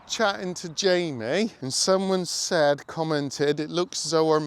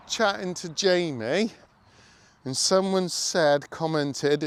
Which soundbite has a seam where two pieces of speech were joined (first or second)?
first